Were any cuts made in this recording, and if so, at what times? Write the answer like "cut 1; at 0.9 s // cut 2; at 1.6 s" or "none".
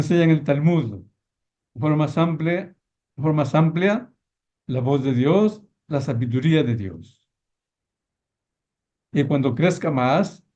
none